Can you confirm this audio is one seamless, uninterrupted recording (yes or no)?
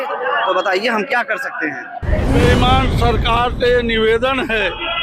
no